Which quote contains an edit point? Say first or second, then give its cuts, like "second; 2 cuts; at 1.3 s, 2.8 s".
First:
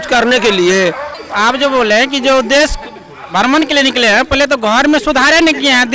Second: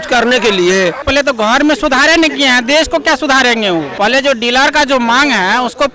second; 2 cuts; at 1.0 s, 3.9 s